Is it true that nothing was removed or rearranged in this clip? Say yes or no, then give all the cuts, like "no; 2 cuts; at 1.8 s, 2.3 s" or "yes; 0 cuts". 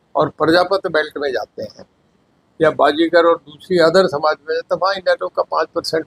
yes; 0 cuts